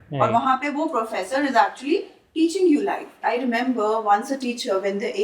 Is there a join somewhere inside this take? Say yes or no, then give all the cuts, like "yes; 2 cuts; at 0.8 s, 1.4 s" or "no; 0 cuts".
yes; 1 cut; at 3.1 s